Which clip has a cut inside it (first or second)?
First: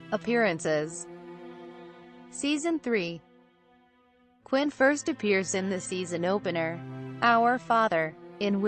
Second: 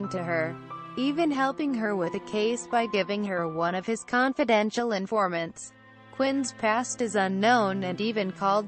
first